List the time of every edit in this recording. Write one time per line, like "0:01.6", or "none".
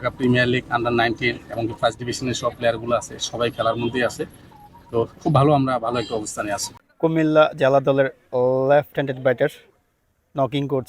0:06.7